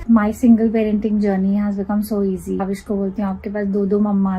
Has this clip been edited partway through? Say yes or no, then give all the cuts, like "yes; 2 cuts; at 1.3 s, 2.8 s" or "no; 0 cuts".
yes; 1 cut; at 2.6 s